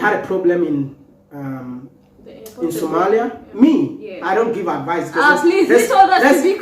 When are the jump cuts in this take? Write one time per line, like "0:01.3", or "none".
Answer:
0:03.4